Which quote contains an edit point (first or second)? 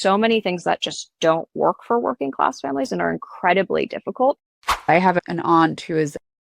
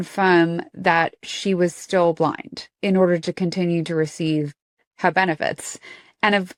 first